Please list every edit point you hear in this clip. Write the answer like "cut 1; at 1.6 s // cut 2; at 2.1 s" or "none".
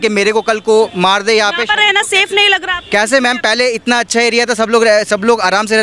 none